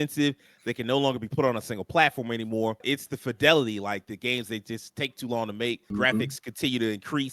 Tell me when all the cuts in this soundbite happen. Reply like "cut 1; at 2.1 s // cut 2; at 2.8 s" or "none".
cut 1; at 2.8 s // cut 2; at 5.9 s